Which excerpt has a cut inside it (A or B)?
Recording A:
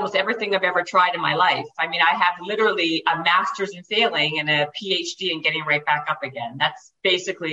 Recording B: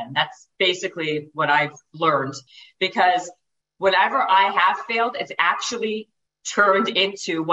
B